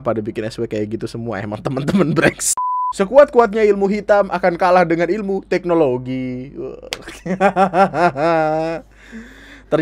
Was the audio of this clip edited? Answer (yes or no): yes